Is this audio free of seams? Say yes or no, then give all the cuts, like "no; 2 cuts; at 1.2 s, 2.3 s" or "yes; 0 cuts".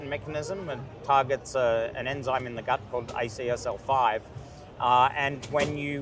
yes; 0 cuts